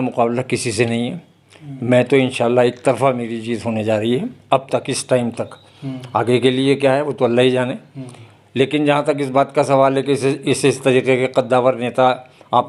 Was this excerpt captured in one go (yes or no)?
yes